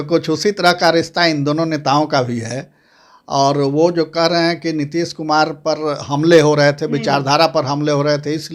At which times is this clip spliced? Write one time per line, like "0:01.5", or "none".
none